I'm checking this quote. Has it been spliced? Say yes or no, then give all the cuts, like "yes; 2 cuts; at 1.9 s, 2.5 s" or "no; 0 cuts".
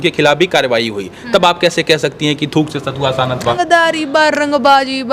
yes; 1 cut; at 3.6 s